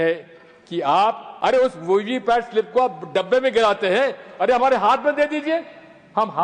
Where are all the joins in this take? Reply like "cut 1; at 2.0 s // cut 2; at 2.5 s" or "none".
cut 1; at 1.3 s